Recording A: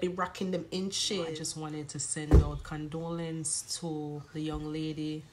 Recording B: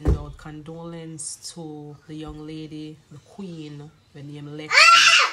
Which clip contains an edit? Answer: A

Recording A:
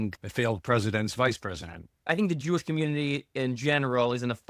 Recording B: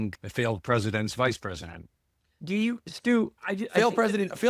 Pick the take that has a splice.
A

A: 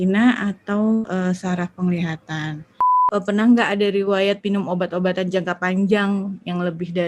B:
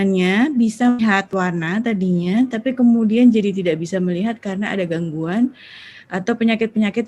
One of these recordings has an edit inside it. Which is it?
A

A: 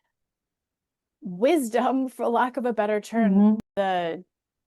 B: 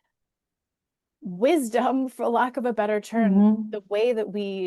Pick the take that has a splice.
A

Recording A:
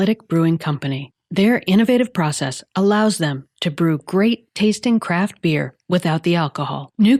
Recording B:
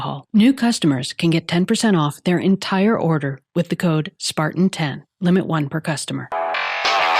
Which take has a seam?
B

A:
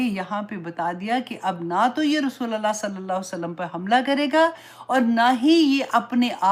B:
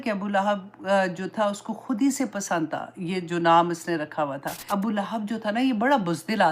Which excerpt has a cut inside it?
B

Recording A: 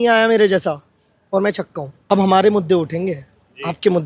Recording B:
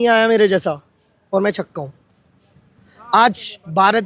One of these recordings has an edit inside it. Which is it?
A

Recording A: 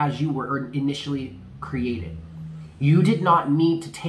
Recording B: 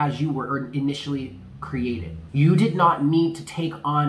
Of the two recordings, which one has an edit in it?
B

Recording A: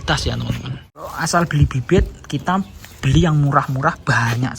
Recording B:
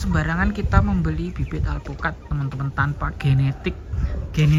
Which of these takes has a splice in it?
A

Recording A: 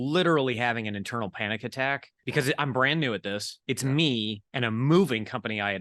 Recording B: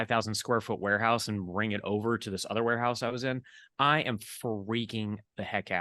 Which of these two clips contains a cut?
A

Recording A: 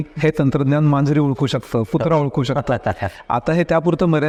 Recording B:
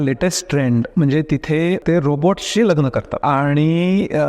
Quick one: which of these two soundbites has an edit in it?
B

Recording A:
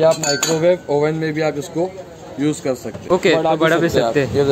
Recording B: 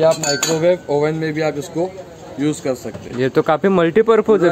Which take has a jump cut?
A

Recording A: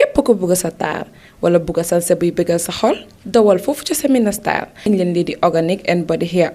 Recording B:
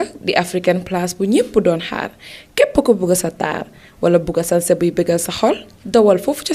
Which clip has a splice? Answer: A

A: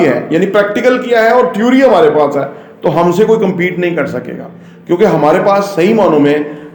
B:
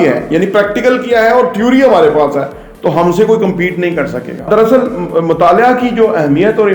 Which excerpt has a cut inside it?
B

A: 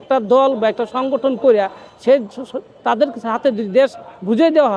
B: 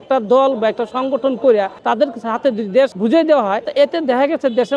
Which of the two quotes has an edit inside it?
B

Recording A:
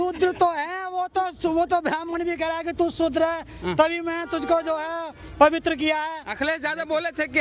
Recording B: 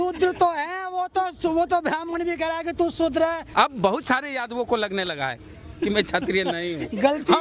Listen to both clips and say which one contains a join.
B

